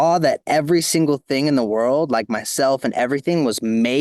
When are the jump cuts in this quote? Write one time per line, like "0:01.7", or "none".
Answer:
none